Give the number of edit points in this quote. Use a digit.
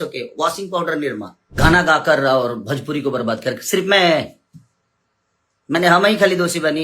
1